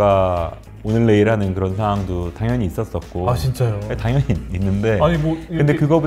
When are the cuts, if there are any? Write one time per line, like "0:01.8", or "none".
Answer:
none